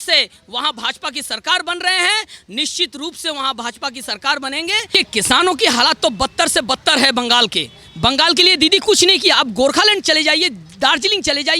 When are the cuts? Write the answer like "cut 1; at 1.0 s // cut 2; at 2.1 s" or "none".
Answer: cut 1; at 4.8 s